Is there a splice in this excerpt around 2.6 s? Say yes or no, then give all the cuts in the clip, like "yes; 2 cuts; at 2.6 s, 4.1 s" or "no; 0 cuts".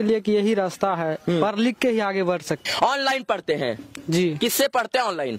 yes; 1 cut; at 2.6 s